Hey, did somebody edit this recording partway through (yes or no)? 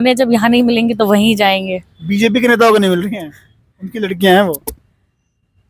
no